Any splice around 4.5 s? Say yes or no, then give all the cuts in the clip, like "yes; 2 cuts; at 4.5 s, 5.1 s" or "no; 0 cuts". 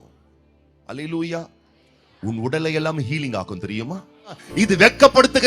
yes; 1 cut; at 4.5 s